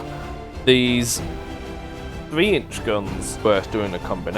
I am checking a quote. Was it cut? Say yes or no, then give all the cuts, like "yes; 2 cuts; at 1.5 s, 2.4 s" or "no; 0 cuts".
yes; 1 cut; at 3.4 s